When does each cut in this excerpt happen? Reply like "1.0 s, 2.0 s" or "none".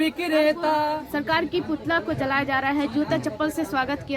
1.0 s